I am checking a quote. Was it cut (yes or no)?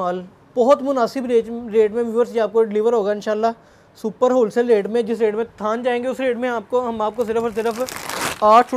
no